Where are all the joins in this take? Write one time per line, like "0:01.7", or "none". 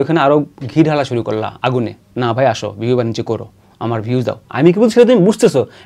0:04.4

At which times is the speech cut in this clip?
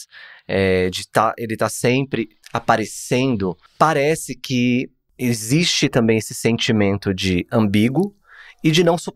0:02.4
0:03.6
0:05.0

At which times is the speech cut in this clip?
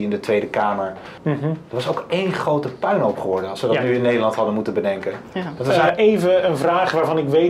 0:01.1
0:05.7

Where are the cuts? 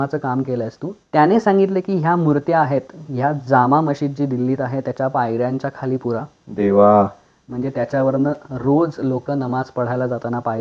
0:00.9

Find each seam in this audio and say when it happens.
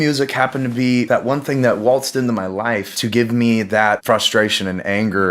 0:01.1
0:02.9
0:04.0

